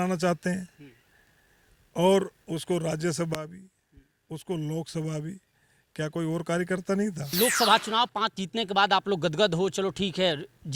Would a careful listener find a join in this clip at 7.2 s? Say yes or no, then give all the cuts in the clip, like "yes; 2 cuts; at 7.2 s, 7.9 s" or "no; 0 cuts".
yes; 1 cut; at 7.2 s